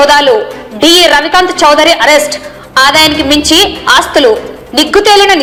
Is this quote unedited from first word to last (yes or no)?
yes